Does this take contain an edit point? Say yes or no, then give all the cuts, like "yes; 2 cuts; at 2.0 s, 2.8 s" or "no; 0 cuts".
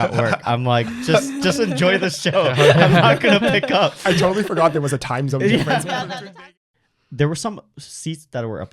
yes; 1 cut; at 6.4 s